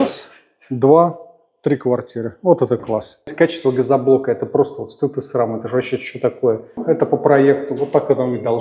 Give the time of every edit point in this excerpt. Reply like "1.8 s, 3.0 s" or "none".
3.3 s, 6.8 s